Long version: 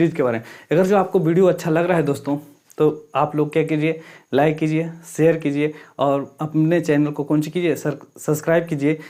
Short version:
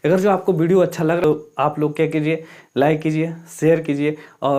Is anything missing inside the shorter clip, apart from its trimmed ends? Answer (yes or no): yes